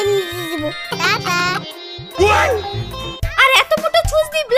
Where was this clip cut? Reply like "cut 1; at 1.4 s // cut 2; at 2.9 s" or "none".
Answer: cut 1; at 0.9 s // cut 2; at 3.2 s